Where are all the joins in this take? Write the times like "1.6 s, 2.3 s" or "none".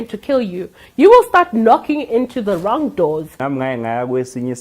3.4 s